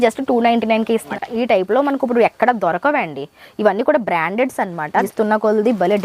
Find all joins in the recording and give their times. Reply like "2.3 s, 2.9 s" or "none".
1.1 s, 5.0 s